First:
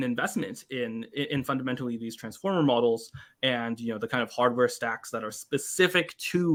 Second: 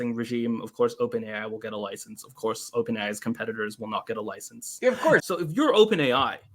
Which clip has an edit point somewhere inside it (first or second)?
second